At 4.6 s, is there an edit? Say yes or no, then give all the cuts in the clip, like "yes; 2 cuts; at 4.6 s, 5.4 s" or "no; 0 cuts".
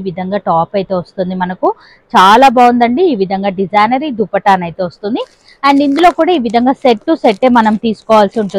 no; 0 cuts